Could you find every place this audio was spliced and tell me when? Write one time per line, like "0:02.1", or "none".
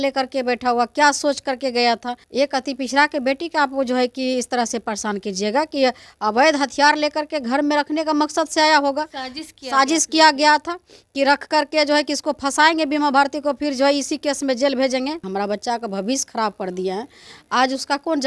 0:02.2
0:15.3